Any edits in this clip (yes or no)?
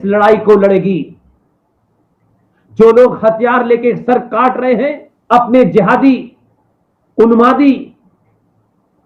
yes